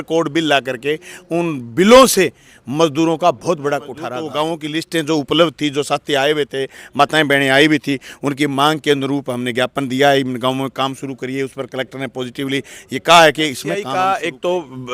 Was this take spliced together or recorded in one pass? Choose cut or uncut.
cut